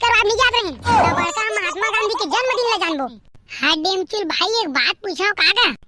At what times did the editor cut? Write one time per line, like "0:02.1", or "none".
0:03.2

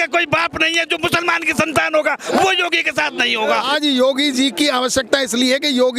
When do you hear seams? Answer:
0:03.7

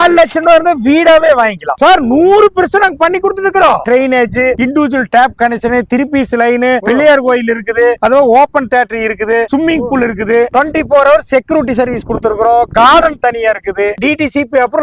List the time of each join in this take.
0:01.8
0:03.8
0:10.5
0:13.9

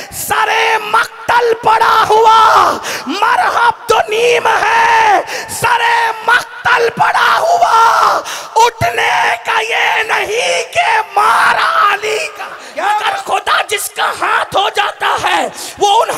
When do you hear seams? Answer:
0:13.0

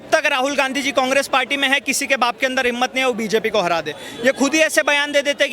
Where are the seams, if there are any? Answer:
none

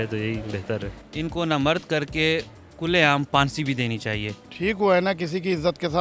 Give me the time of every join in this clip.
0:01.0
0:04.4

